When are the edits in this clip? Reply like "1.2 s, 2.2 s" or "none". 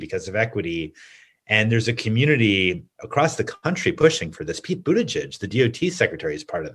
none